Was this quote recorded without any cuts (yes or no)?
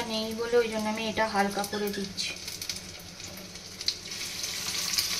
yes